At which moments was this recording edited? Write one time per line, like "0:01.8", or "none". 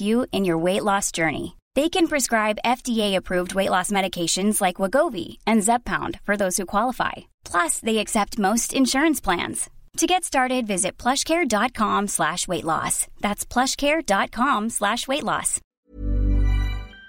0:15.6